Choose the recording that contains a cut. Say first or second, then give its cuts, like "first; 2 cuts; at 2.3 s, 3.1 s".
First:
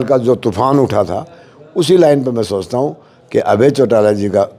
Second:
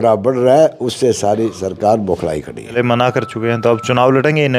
second; 1 cut; at 2.8 s